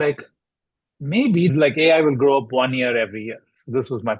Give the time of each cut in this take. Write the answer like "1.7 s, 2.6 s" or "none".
1.5 s